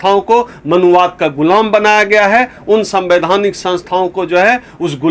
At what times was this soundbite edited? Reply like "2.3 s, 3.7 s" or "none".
none